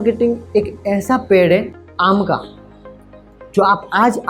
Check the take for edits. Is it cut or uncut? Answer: cut